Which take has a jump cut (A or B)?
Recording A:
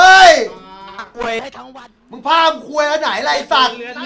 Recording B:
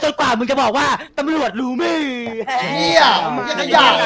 A